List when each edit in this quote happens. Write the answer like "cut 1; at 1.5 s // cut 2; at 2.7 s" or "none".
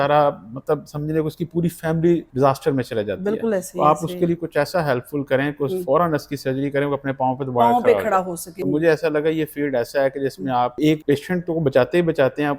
cut 1; at 2.3 s // cut 2; at 8.5 s // cut 3; at 10.9 s